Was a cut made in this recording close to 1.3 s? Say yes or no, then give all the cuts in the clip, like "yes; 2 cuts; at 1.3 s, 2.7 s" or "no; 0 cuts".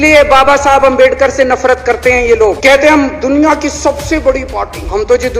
no; 1 cut; at 2.6 s